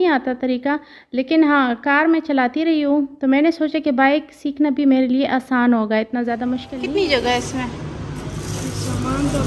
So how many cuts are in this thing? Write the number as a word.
one